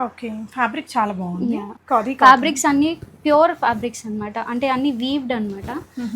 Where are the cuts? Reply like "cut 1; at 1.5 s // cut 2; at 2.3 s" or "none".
cut 1; at 1.7 s